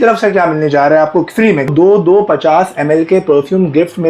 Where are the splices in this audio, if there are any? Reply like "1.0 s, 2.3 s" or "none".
1.7 s